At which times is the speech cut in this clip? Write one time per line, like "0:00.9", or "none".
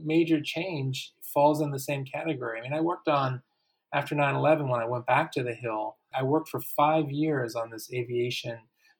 0:06.1